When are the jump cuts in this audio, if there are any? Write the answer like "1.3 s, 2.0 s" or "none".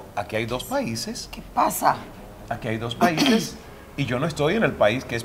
none